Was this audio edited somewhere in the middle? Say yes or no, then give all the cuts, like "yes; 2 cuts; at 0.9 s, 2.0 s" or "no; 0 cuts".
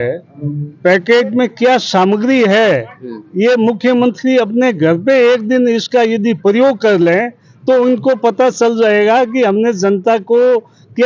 no; 0 cuts